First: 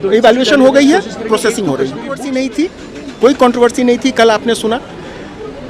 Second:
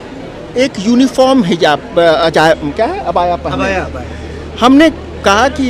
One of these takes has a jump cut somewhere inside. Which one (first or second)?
first